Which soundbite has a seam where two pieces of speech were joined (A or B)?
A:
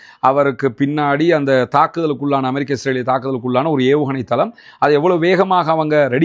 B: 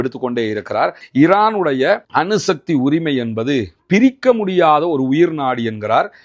B